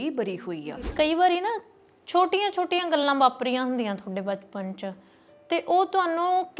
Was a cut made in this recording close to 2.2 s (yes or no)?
no